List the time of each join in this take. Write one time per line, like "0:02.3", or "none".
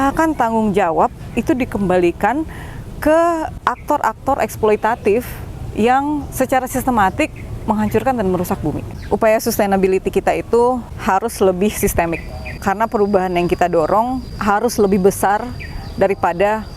0:03.6
0:08.9
0:10.9
0:12.6
0:14.3